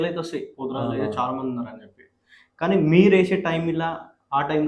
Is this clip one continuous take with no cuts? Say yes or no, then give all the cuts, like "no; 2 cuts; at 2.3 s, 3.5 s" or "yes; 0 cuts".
yes; 0 cuts